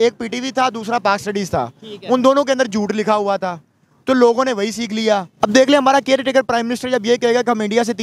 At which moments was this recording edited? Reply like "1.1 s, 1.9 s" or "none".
5.3 s